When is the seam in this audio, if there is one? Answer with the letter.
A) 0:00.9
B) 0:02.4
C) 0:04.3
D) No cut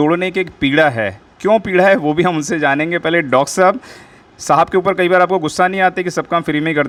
D